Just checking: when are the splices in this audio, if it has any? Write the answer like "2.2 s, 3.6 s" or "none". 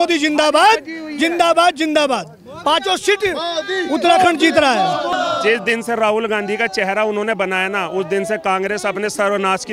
5.1 s